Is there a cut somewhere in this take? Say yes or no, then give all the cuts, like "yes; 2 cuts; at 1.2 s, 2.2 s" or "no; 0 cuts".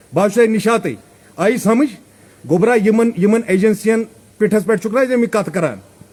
no; 0 cuts